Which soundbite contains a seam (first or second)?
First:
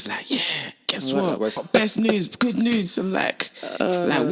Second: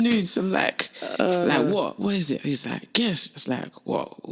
first